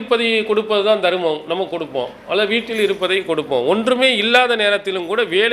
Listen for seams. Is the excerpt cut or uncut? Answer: uncut